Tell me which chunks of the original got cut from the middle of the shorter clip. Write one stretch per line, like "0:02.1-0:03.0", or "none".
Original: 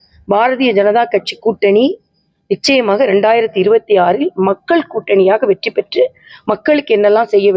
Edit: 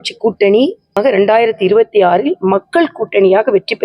0:02.2-0:02.9